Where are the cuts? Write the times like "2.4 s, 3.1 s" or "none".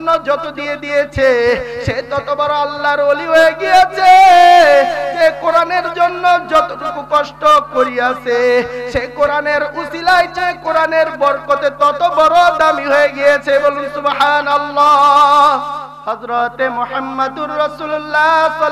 15.9 s